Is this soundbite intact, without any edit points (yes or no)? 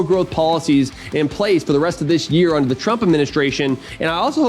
yes